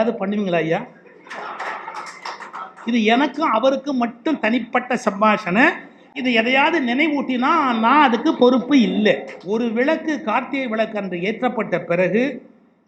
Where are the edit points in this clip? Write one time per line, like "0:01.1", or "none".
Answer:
0:09.3